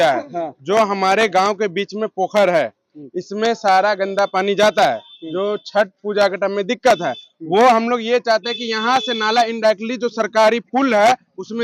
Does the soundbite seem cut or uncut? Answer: uncut